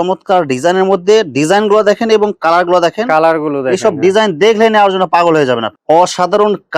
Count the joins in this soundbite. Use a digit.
1